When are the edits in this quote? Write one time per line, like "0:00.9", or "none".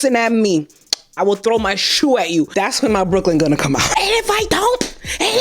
0:03.9